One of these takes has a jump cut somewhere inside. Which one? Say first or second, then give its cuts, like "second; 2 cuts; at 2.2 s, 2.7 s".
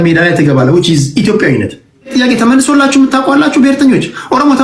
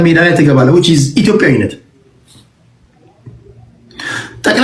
first; 1 cut; at 2.1 s